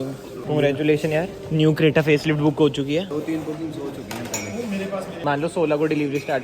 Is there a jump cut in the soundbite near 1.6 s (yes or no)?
no